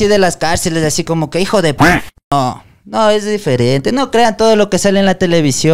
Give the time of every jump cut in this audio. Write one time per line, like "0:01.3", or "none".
none